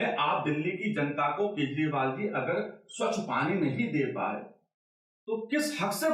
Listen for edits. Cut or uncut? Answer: uncut